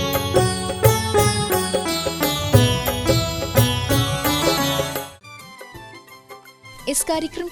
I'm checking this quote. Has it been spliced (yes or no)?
yes